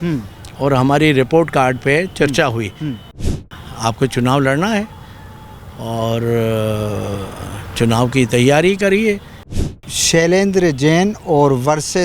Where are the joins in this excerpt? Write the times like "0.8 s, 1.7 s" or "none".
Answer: 3.3 s, 9.8 s